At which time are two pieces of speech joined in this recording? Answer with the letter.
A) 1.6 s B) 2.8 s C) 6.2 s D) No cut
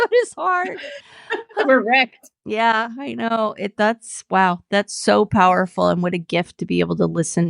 A